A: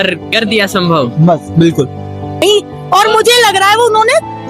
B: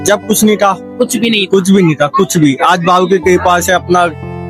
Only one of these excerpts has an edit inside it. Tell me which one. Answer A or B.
A